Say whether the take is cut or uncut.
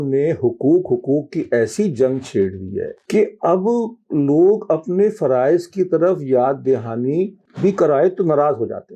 cut